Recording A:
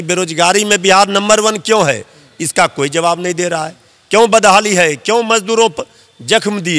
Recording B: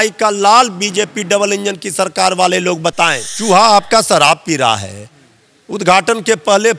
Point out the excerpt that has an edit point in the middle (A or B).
B